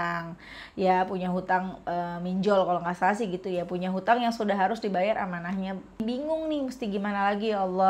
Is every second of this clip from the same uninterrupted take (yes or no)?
no